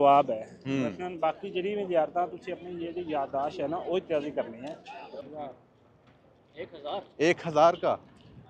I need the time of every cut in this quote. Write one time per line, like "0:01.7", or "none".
0:05.2